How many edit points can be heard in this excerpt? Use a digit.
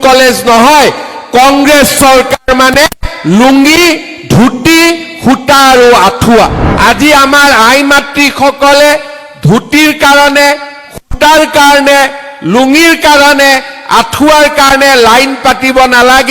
1